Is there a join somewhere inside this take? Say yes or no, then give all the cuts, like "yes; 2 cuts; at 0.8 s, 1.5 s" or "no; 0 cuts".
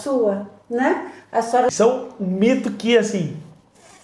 yes; 1 cut; at 1.7 s